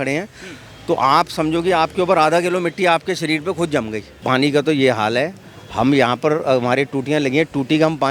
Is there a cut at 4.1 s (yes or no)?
yes